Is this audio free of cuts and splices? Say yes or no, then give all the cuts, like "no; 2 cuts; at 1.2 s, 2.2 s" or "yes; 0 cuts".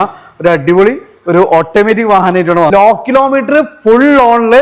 no; 1 cut; at 2.7 s